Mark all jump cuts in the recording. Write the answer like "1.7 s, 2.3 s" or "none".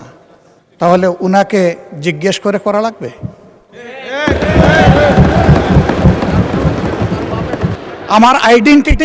7.8 s